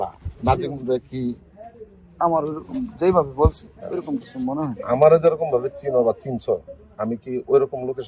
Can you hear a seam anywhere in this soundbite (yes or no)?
no